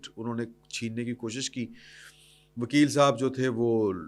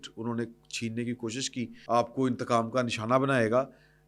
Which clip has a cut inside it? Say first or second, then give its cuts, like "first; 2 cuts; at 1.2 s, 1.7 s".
second; 1 cut; at 1.7 s